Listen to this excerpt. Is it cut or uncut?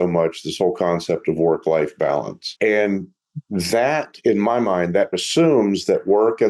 cut